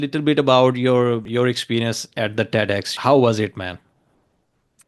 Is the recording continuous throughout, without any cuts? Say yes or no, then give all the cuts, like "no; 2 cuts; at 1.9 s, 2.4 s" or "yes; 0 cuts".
no; 2 cuts; at 1.2 s, 2.9 s